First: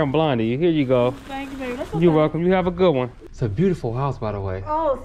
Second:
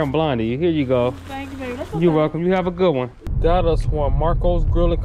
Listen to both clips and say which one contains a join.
first; 1 cut; at 3.2 s

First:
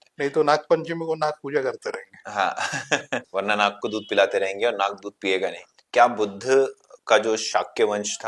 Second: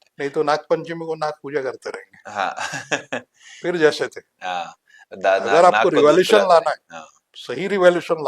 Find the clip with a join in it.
first; 2 cuts; at 3.3 s, 5.7 s

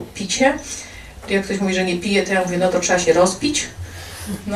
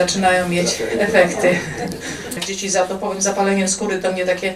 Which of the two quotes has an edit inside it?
second; 1 cut; at 2.4 s

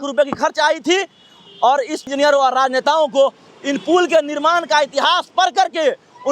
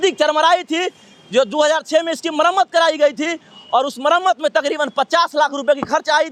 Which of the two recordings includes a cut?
first; 1 cut; at 2.1 s

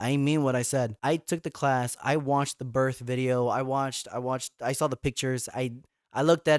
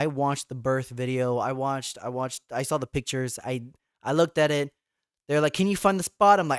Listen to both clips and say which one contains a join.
first; 1 cut; at 0.9 s

